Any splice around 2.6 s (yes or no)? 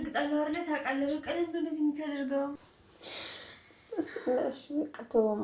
yes